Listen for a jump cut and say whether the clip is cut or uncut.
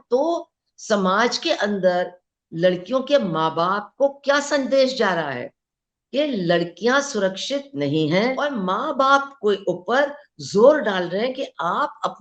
cut